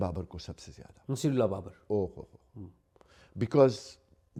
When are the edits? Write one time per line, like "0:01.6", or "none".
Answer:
none